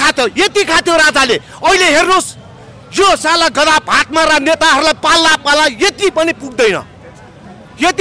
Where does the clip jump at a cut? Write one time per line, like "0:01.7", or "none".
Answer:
none